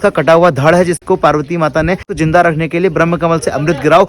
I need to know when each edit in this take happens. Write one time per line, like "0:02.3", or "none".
0:02.1